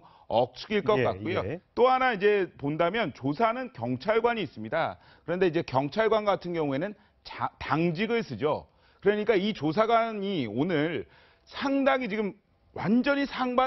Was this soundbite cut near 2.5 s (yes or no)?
yes